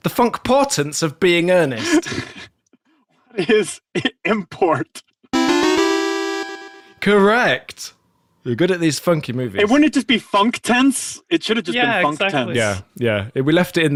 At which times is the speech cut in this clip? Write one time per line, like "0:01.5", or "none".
none